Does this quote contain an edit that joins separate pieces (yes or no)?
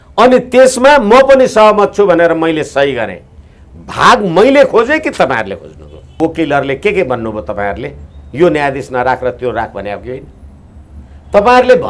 yes